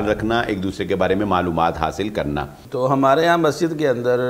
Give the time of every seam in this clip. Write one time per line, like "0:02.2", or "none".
0:02.6